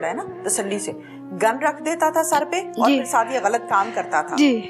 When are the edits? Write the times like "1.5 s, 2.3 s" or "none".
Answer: none